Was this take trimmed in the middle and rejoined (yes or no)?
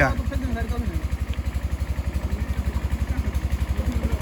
no